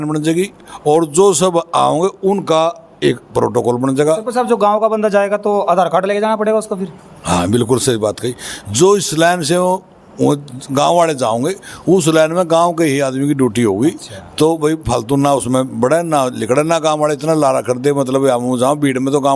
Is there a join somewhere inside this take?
no; 0 cuts

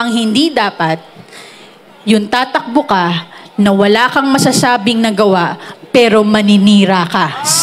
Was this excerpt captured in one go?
yes; 0 cuts

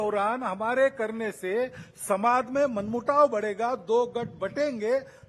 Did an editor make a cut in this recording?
no; 0 cuts

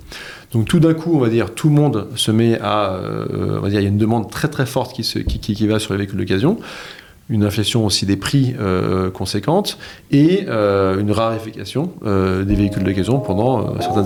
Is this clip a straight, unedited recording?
yes; 0 cuts

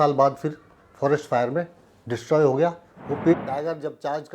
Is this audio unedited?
no; 1 cut; at 3.3 s

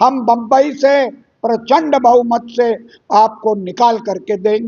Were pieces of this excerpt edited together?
no; 0 cuts

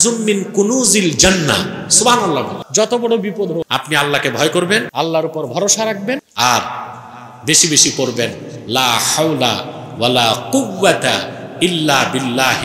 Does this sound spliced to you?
yes; 4 cuts; at 2.6 s, 3.7 s, 4.9 s, 6.3 s

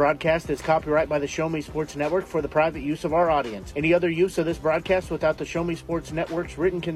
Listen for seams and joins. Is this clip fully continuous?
yes; 0 cuts

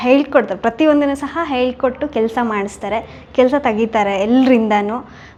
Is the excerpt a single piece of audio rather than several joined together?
yes; 0 cuts

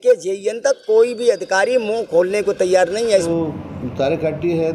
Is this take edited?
yes; 1 cut; at 3.2 s

